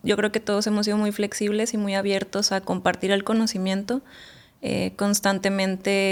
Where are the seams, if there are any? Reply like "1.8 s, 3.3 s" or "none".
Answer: none

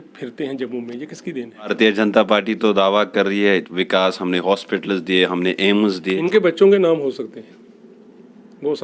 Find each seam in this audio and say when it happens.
1.7 s

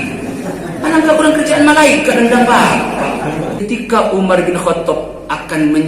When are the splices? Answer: 3.6 s

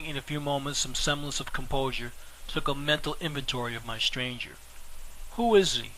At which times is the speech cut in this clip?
2.2 s

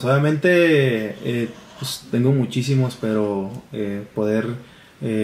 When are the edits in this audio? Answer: none

